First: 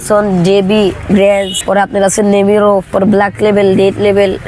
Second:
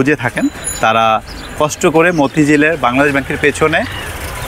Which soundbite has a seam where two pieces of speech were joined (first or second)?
first